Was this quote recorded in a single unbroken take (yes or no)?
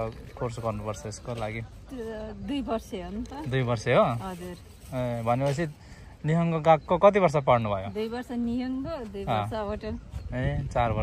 yes